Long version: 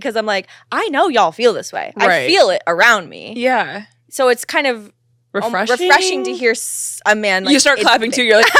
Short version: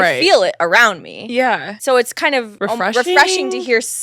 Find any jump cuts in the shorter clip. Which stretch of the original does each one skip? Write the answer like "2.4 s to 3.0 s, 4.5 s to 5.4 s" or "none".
3.8 s to 4.0 s, 4.8 s to 5.3 s